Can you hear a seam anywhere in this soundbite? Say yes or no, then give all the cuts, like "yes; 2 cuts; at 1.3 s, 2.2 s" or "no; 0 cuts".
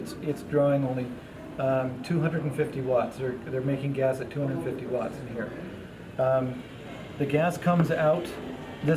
yes; 1 cut; at 1.1 s